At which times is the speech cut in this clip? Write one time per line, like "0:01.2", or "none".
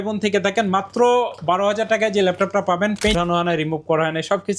0:03.1